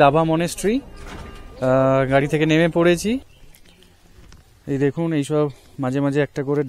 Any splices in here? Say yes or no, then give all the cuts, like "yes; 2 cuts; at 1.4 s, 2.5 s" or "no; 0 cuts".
yes; 1 cut; at 3.3 s